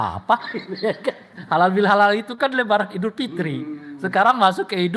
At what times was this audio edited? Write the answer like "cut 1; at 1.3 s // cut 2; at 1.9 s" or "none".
cut 1; at 1.3 s